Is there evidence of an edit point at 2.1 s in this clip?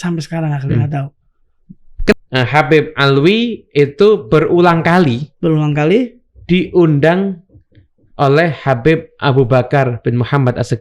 yes; 1 cut; at 2.1 s

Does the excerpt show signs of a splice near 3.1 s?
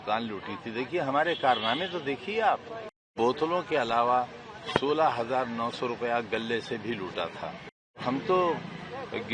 yes; 2 cuts; at 3.1 s, 8.0 s

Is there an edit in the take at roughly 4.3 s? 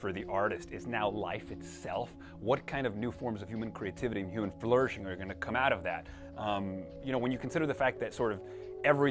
yes; 1 cut; at 4.3 s

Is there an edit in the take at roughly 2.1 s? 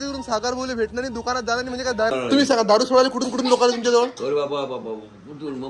yes; 1 cut; at 2.1 s

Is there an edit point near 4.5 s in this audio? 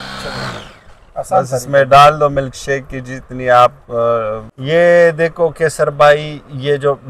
yes; 1 cut; at 4.5 s

